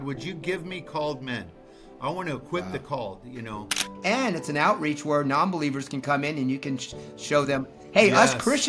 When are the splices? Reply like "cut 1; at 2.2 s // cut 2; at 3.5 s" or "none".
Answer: cut 1; at 3.9 s